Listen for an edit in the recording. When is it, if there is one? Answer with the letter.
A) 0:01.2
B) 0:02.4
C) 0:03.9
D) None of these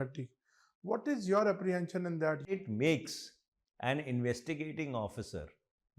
B